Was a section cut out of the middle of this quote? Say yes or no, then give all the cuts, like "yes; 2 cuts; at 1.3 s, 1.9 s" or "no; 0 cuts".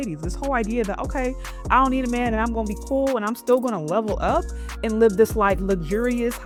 no; 0 cuts